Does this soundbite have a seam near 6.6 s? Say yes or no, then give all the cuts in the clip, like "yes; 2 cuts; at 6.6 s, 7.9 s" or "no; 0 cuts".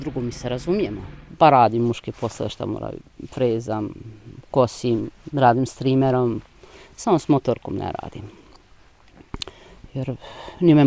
no; 1 cut; at 1.2 s